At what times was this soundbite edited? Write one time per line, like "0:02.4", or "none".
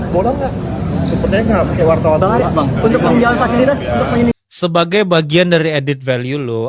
0:04.5